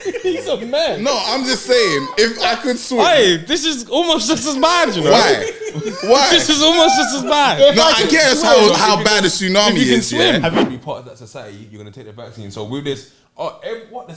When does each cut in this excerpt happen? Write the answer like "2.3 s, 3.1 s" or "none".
10.6 s

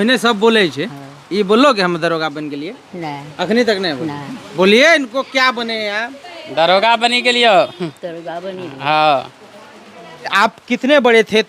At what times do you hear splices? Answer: 10.3 s

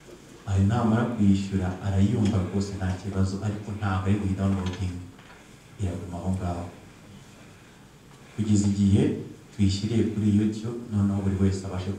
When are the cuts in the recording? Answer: none

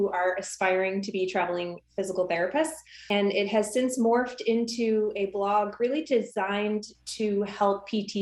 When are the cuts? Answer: 3.1 s

